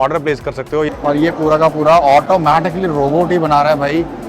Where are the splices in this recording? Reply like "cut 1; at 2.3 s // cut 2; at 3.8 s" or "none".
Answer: cut 1; at 0.9 s